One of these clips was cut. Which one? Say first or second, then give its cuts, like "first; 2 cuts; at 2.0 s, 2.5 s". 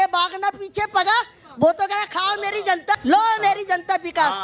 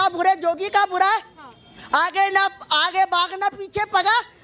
first; 1 cut; at 3.0 s